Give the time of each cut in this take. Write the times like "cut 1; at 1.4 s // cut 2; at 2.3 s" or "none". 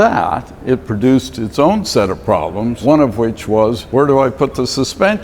cut 1; at 2.8 s // cut 2; at 3.8 s